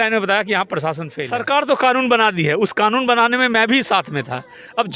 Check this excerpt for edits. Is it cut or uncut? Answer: cut